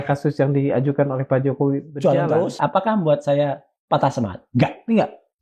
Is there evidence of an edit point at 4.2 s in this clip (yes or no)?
no